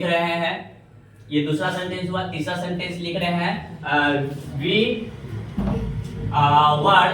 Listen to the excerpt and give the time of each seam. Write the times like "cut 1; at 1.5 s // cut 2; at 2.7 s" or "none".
none